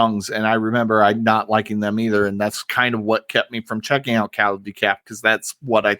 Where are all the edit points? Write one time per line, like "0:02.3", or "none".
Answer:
none